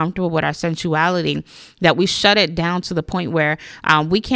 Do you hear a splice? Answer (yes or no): no